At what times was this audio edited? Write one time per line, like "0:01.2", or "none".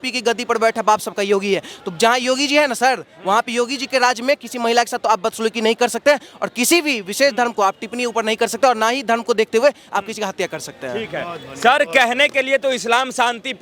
none